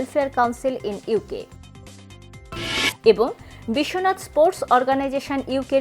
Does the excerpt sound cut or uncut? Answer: cut